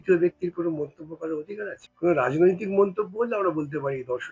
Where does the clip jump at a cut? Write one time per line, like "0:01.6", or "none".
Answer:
0:01.8